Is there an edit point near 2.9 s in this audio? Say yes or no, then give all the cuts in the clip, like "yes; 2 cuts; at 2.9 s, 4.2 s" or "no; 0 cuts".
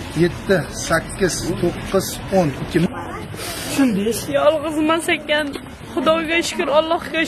yes; 1 cut; at 2.9 s